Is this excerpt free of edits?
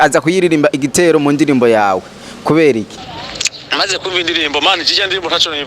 no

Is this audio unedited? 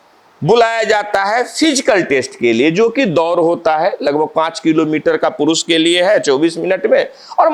yes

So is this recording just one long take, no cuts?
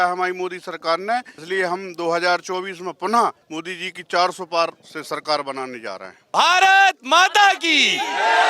no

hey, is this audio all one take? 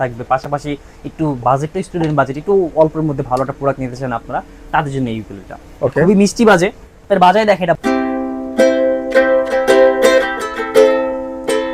no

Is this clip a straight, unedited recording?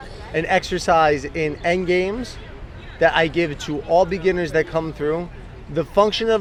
yes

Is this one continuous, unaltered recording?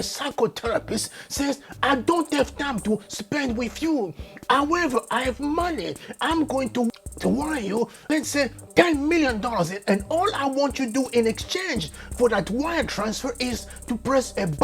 no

